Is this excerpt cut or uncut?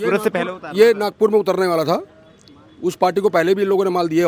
uncut